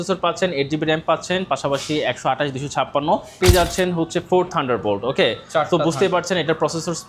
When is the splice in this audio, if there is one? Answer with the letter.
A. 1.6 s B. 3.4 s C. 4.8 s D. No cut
B